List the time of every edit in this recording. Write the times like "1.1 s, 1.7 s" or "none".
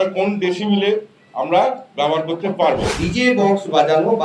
3.0 s